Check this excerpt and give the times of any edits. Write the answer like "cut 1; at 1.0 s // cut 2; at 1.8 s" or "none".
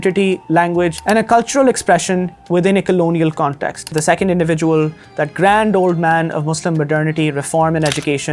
cut 1; at 1.0 s // cut 2; at 4.0 s